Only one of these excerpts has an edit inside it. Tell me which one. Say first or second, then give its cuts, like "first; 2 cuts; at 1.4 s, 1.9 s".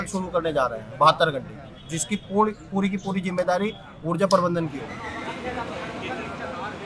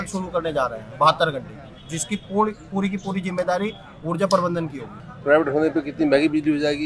second; 1 cut; at 5.1 s